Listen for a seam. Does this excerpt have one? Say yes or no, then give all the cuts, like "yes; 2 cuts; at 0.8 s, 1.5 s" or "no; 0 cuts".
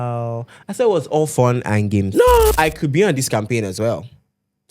yes; 1 cut; at 2.5 s